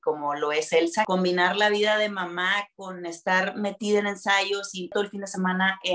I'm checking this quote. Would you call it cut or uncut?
cut